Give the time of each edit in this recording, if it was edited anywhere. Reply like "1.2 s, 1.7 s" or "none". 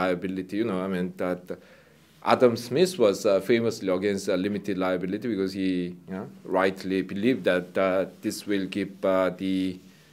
8.7 s